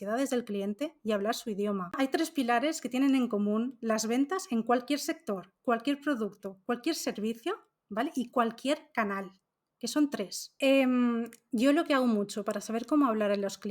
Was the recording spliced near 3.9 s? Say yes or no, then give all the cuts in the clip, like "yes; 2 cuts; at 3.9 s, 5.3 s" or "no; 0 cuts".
no; 2 cuts; at 2.0 s, 10.4 s